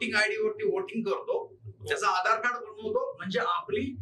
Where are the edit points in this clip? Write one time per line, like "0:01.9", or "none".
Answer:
none